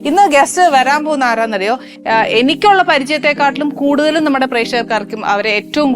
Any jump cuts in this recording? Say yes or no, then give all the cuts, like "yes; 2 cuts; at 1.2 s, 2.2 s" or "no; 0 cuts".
yes; 1 cut; at 1.9 s